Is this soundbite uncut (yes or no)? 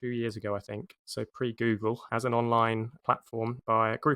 no